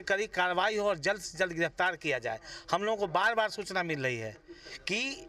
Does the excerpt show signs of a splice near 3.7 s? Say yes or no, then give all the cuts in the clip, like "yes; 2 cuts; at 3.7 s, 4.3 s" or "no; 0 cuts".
no; 0 cuts